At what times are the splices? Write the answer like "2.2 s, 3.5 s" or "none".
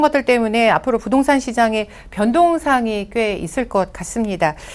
none

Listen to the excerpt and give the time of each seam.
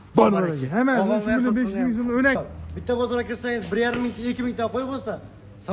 2.4 s

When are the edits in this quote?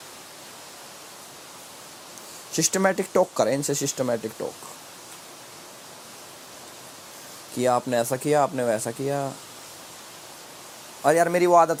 none

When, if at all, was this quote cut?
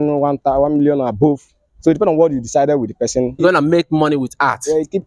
3.4 s

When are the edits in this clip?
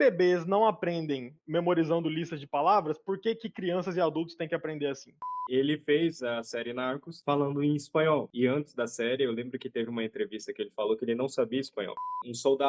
5.2 s, 11.9 s

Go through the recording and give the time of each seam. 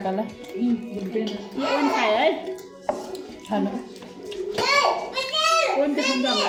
none

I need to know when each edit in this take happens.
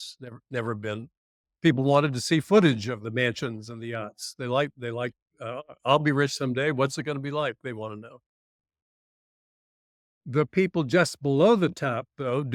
none

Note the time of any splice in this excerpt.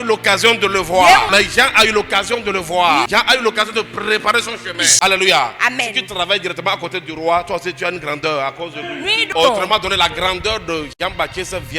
1.3 s, 3.0 s, 4.9 s, 9.3 s

